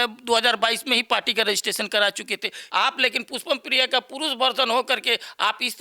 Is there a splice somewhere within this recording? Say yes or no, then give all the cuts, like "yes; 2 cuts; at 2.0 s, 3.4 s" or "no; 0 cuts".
yes; 1 cut; at 2.6 s